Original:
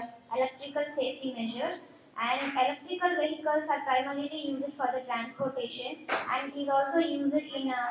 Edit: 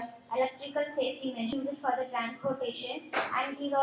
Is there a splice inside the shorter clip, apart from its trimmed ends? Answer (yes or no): yes